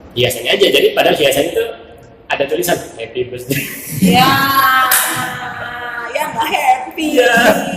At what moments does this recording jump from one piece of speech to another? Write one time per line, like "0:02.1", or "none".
none

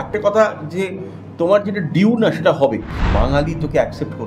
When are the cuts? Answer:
0:03.0

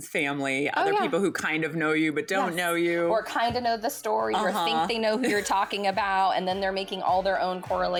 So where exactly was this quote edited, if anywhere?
none

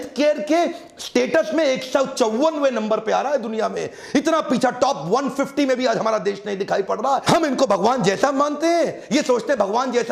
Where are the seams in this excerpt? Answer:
none

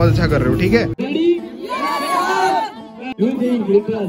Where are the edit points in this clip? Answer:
0:00.9
0:03.1

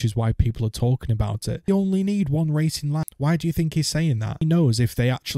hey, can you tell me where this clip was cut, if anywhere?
0:01.7
0:03.1
0:04.4

